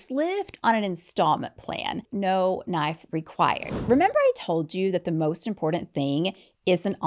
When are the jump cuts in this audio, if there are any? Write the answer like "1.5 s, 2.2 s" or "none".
2.1 s, 3.7 s

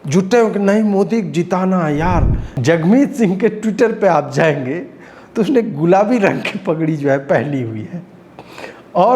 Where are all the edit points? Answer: 2.4 s

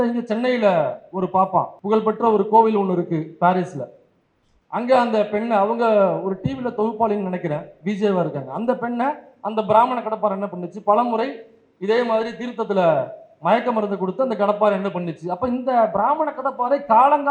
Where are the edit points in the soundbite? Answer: 1.8 s

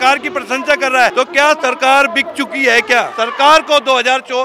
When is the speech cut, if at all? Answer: 1.1 s, 3.2 s

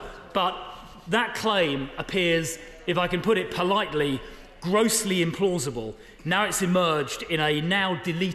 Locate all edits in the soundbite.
none

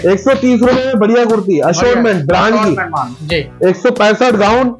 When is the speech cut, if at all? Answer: 3.1 s

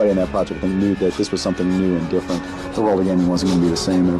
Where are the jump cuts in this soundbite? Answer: 2.6 s

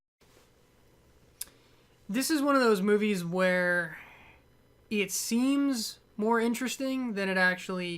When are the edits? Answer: 4.6 s

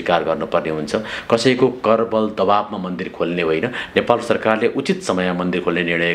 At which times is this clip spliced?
none

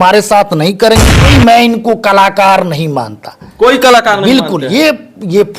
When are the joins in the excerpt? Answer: 1.3 s

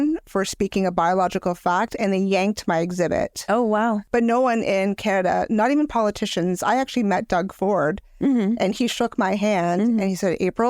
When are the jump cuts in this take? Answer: 4.0 s

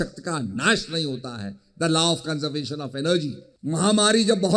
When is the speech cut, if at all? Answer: 3.5 s

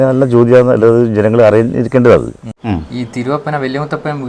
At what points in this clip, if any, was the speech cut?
2.5 s

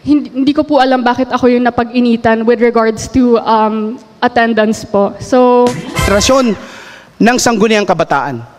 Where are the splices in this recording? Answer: 5.9 s

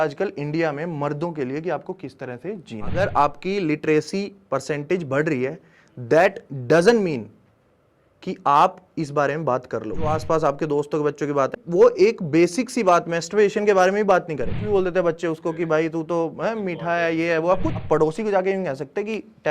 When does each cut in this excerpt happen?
2.9 s, 10.1 s, 11.6 s, 14.6 s, 17.8 s

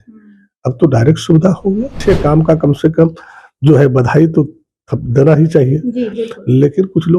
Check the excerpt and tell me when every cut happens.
2.0 s

